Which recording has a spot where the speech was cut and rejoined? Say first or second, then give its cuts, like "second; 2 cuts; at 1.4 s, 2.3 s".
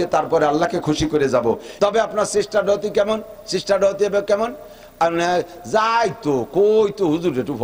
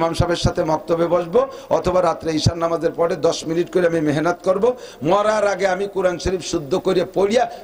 first; 1 cut; at 1.7 s